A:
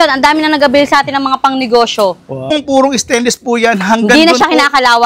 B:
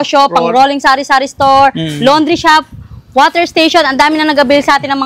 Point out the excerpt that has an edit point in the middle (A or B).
A